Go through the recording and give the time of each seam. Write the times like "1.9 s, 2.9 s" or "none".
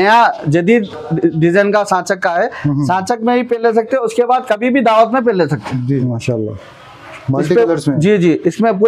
5.8 s

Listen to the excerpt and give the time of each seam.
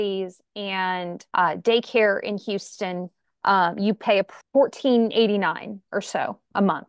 1.2 s, 4.4 s

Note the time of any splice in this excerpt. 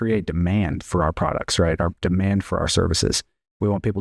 none

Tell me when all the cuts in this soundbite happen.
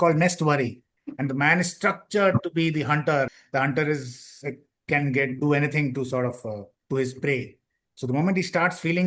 3.4 s

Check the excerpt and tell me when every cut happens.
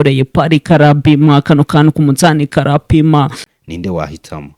3.4 s

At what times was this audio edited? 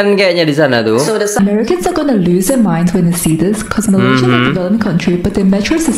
1.4 s

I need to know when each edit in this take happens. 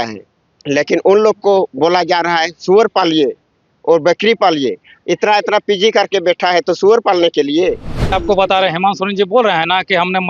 8.1 s

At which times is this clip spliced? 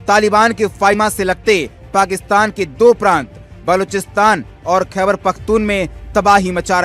1.0 s

